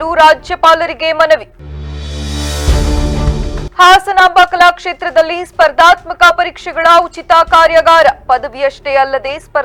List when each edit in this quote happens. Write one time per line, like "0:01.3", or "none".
none